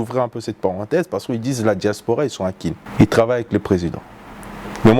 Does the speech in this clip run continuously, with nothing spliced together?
no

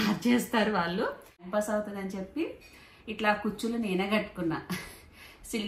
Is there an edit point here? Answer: yes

